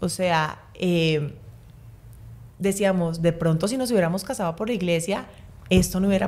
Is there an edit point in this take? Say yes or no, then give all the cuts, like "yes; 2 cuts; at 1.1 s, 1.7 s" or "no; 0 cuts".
no; 0 cuts